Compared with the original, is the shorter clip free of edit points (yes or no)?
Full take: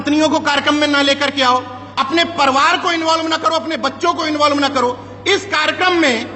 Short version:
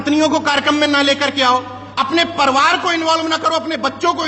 yes